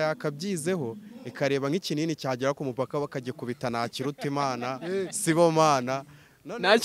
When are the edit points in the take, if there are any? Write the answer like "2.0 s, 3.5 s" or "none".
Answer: none